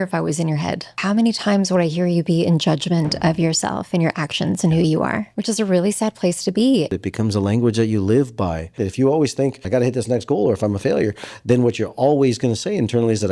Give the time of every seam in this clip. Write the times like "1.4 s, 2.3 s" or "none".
0.9 s, 5.3 s, 6.9 s, 8.8 s, 9.6 s